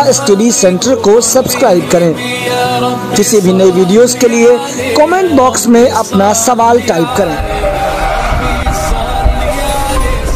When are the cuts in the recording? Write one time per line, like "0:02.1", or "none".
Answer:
none